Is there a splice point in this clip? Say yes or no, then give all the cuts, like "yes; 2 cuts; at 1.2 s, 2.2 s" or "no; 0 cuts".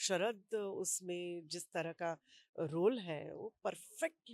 no; 0 cuts